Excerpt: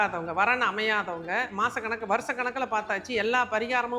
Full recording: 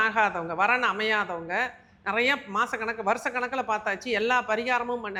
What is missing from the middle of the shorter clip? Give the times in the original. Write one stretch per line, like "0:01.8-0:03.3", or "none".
0:01.7-0:02.5

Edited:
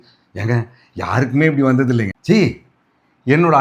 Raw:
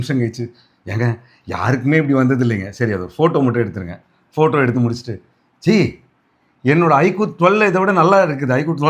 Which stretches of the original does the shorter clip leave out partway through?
0:02.6-0:05.5

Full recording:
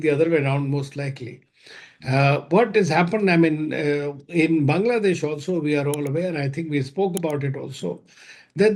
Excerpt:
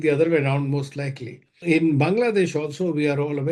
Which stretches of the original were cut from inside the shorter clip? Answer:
0:01.5-0:04.2

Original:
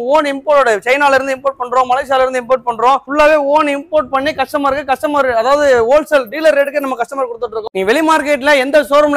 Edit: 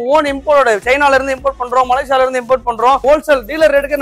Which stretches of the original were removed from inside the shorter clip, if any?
0:03.0-0:05.9

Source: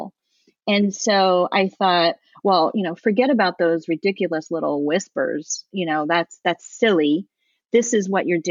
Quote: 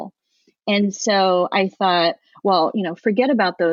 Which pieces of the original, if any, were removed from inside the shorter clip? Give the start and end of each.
none

